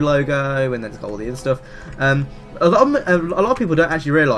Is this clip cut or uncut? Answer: uncut